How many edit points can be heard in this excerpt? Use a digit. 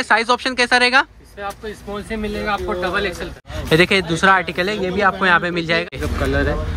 2